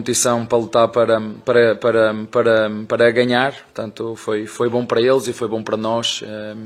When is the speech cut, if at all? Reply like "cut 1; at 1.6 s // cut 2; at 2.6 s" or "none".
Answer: none